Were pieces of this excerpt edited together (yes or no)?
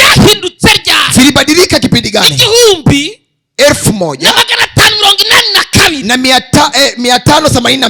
no